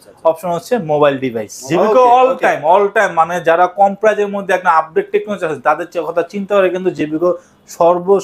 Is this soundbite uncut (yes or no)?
no